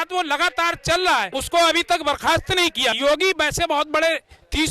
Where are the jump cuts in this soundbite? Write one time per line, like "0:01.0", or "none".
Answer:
0:01.4
0:03.0